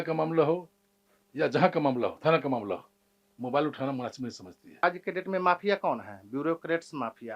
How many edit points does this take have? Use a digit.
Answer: 1